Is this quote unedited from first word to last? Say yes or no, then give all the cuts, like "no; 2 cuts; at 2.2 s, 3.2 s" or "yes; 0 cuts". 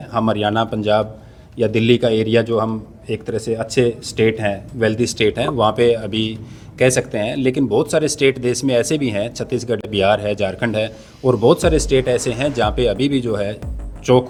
yes; 0 cuts